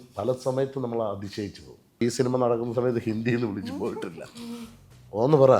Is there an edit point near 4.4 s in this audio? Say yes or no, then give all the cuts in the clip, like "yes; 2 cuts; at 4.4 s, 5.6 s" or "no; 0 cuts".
no; 1 cut; at 2.0 s